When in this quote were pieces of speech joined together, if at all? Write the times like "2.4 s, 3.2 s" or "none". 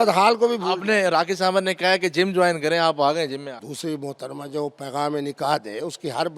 3.7 s